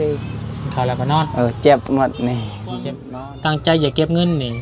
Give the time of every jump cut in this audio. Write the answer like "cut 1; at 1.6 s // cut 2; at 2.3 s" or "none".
cut 1; at 3.0 s